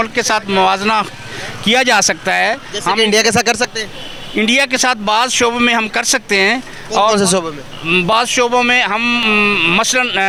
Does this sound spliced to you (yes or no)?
no